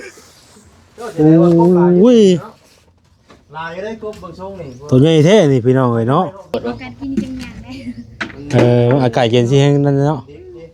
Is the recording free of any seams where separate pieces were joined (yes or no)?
no